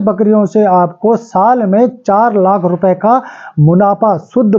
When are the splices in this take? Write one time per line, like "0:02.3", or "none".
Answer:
none